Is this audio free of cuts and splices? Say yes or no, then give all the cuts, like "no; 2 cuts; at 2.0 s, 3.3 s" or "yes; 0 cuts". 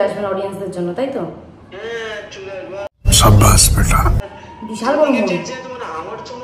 yes; 0 cuts